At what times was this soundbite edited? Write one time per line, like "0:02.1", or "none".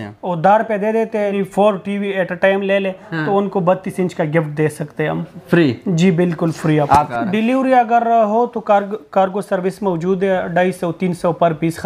0:01.3
0:07.1